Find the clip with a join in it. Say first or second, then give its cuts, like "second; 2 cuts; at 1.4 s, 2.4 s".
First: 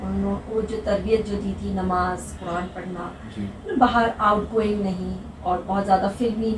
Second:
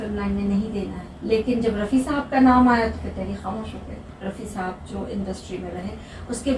second; 2 cuts; at 1.1 s, 4.1 s